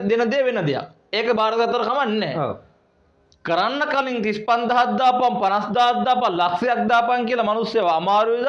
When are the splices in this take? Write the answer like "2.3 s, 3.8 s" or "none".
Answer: none